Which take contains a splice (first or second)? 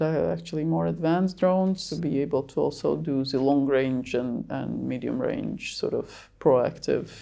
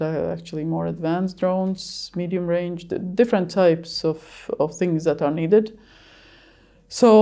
first